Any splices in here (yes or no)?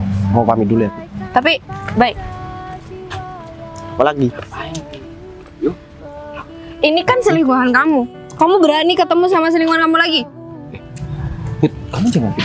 no